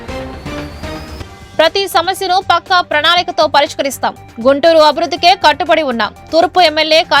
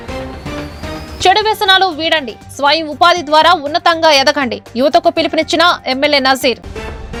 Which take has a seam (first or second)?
first